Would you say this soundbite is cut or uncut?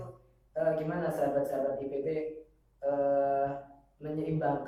uncut